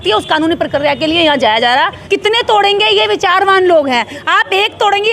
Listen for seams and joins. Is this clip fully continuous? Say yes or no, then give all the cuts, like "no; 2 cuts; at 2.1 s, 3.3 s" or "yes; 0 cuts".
no; 1 cut; at 2.0 s